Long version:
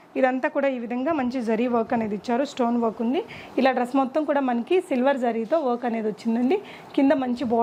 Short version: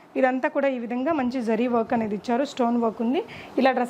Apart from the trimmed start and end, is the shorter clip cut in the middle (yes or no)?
no